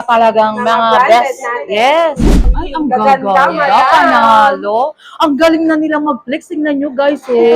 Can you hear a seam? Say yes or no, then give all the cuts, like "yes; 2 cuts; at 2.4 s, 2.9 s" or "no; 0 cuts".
yes; 1 cut; at 2.5 s